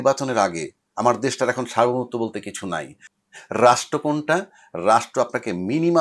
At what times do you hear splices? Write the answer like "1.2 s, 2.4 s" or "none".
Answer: 3.0 s